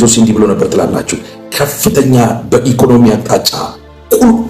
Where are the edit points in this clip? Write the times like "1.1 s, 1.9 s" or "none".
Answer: none